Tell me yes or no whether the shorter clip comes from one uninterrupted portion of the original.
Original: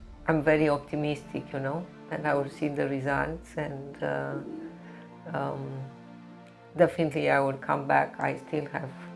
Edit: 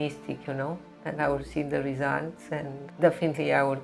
no